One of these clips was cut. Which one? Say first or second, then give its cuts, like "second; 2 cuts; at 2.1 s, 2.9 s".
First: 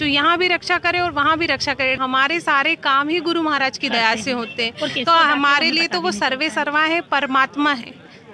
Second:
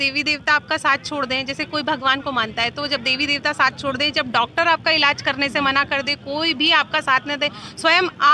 first; 1 cut; at 2.0 s